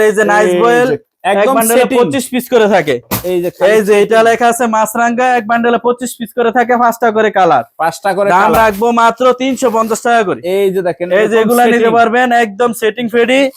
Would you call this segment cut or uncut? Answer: uncut